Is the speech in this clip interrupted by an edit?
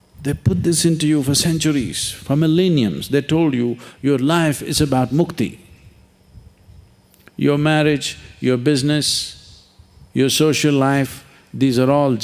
no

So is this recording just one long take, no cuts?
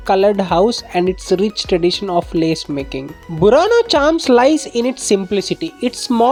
yes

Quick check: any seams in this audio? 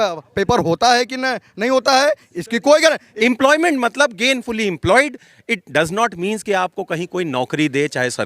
yes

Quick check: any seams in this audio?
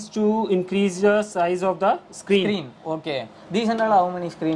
no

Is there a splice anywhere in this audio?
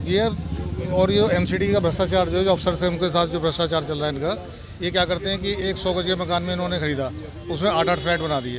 no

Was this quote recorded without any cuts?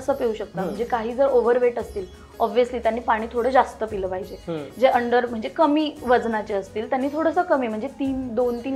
yes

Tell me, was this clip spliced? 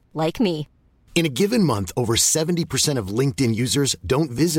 no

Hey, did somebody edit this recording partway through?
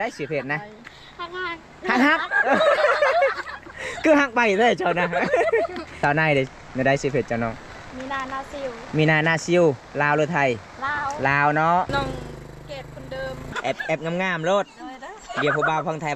yes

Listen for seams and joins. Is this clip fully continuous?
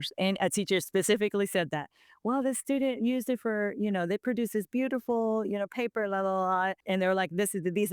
no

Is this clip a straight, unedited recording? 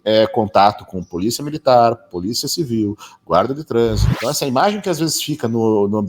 no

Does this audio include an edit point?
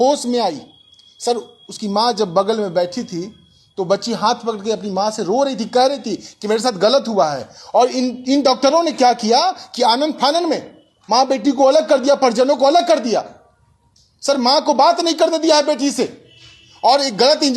no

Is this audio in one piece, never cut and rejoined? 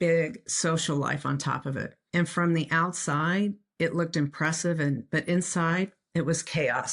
no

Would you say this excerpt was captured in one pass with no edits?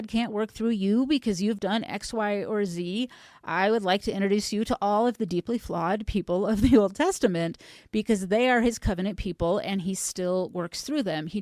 yes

